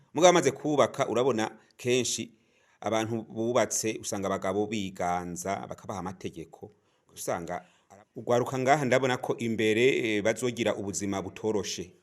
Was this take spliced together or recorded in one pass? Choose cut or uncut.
cut